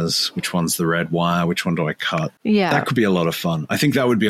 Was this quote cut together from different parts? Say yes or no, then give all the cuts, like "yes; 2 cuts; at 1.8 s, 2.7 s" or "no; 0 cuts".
yes; 1 cut; at 2.4 s